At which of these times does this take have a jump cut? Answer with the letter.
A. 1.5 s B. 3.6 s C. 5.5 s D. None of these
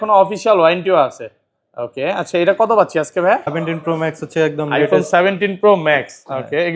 B